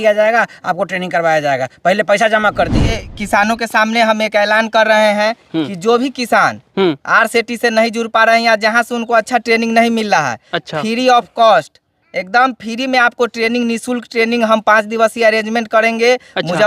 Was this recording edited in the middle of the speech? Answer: yes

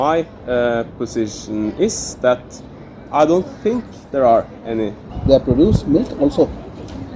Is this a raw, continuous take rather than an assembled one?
no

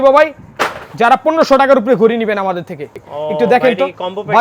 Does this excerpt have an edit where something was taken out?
yes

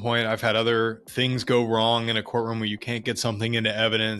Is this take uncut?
no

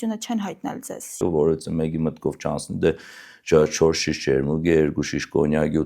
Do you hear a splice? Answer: yes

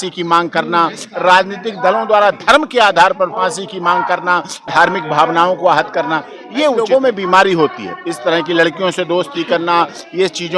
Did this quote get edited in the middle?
yes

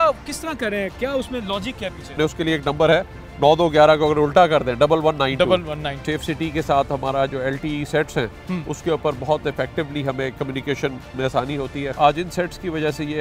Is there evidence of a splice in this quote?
yes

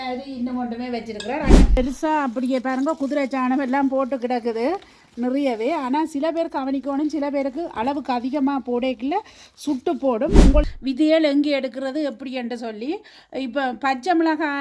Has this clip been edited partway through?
yes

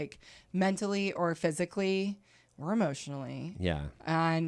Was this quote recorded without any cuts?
yes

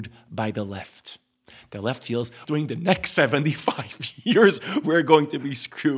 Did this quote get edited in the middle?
yes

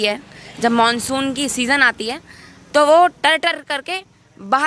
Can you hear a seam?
no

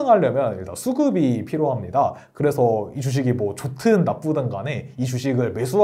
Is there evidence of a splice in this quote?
no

